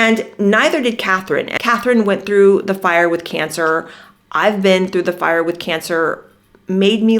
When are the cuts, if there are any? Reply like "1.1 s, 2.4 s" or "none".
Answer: 1.5 s